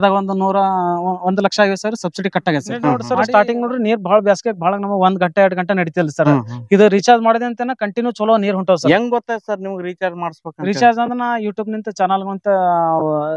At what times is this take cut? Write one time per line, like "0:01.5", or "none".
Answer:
0:03.0